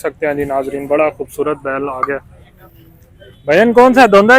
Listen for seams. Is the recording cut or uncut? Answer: uncut